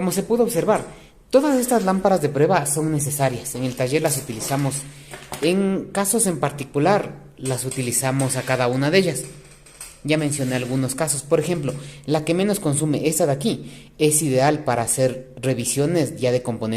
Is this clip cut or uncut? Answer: uncut